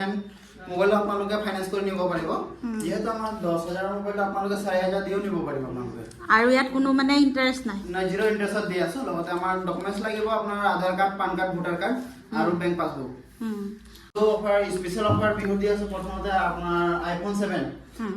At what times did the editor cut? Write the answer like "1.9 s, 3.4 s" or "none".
14.2 s